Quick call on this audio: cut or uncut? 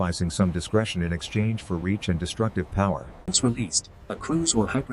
cut